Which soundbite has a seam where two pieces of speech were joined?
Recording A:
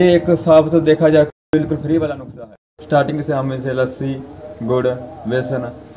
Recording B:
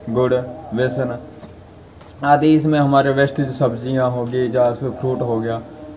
A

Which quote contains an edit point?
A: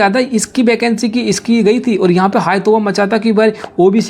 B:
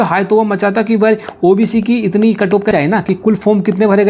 B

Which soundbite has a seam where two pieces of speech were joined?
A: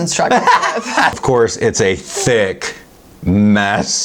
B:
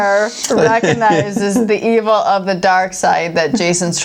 A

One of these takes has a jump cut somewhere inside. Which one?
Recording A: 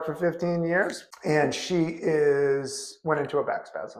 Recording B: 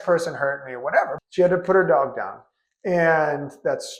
B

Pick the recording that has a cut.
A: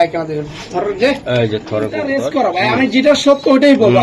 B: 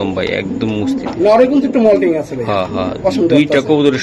A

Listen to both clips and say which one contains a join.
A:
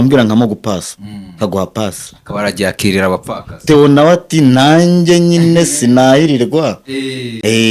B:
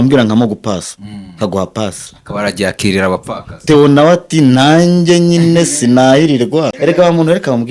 B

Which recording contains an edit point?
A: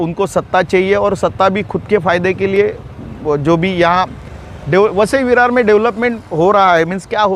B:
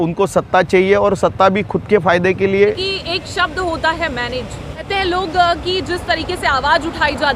B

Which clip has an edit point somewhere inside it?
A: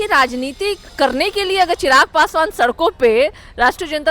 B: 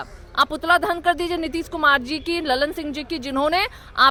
A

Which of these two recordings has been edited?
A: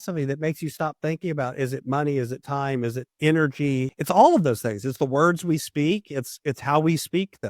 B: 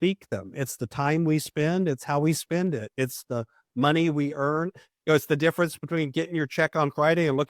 A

